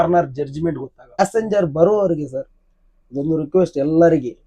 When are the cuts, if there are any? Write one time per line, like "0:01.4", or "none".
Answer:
0:01.2